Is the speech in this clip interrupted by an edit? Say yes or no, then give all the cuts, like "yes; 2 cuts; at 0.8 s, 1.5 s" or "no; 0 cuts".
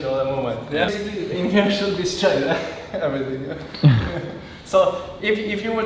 yes; 1 cut; at 0.9 s